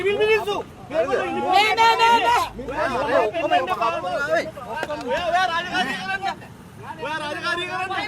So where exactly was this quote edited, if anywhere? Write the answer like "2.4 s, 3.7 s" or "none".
none